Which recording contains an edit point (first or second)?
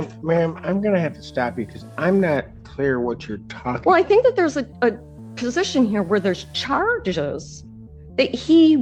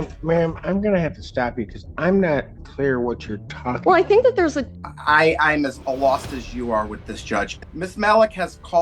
second